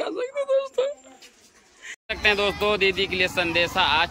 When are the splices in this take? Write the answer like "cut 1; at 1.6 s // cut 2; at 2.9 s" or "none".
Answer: cut 1; at 2.0 s